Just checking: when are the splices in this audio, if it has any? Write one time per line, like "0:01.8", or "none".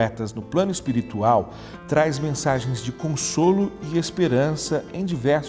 0:01.6